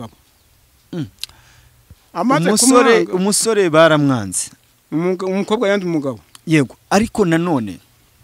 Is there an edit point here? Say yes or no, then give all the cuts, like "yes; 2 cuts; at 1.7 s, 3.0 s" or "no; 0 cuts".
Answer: no; 0 cuts